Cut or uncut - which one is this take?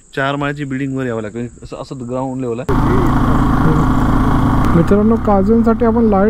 cut